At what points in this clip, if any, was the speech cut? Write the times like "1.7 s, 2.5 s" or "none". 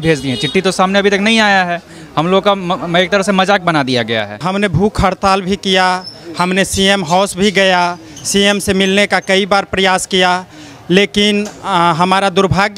4.4 s